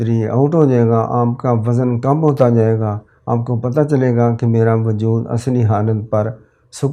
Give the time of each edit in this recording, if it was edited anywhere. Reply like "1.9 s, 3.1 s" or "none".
none